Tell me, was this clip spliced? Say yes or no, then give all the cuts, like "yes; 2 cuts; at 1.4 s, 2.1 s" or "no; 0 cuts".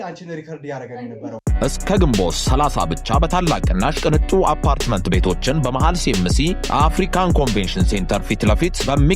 yes; 1 cut; at 1.4 s